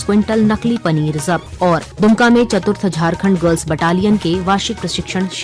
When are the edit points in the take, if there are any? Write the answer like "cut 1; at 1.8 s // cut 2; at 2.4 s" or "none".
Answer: cut 1; at 1.8 s